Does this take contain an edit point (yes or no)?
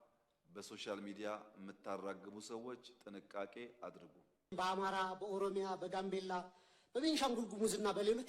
yes